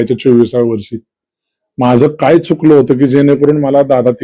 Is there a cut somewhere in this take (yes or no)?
no